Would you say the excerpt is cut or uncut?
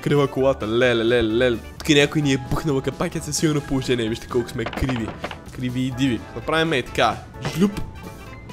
cut